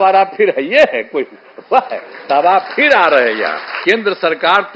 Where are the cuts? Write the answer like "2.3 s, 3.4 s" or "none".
3.8 s